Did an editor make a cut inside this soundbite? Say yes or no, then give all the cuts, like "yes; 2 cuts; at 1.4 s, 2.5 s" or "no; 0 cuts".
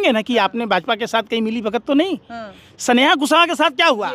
no; 0 cuts